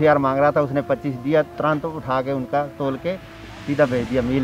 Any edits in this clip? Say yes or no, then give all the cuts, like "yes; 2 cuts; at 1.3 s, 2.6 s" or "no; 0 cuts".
no; 0 cuts